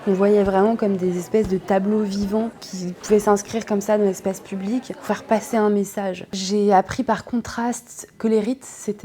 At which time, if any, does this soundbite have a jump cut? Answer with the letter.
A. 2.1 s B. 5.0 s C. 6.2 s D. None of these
C